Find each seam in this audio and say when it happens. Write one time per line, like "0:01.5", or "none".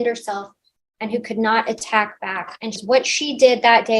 0:02.8